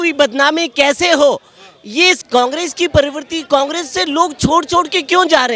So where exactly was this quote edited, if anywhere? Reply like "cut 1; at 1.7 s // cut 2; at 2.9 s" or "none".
cut 1; at 2.2 s